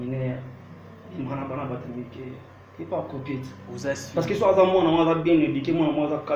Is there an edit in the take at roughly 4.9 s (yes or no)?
no